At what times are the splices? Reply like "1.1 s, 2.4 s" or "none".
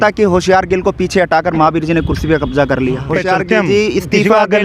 3.1 s